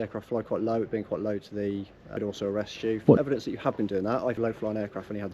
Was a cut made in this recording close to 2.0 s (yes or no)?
yes